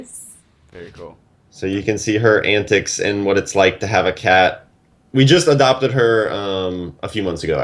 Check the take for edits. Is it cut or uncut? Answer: cut